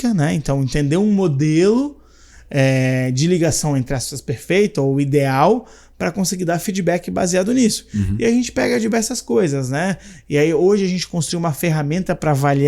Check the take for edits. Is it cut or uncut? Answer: uncut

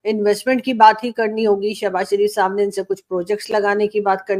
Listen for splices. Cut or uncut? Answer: uncut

